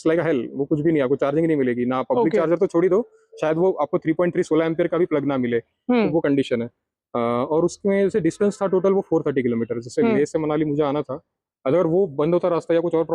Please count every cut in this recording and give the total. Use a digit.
0